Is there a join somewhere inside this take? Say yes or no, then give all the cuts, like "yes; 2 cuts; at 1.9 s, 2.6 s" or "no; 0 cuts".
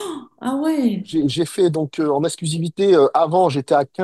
yes; 1 cut; at 1.1 s